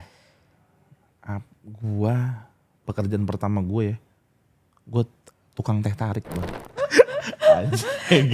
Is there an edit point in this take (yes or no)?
yes